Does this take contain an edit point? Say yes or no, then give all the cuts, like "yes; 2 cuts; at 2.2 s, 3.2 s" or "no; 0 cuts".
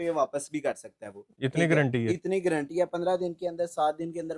no; 0 cuts